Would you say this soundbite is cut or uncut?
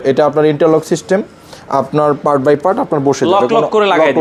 uncut